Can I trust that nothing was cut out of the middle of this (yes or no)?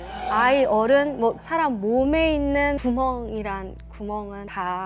yes